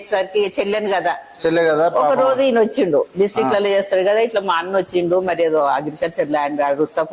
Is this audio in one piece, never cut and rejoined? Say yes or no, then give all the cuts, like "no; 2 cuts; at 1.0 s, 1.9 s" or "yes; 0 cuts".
yes; 0 cuts